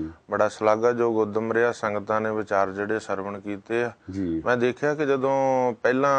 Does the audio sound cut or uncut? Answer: uncut